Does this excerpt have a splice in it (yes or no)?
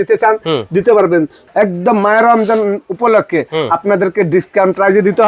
yes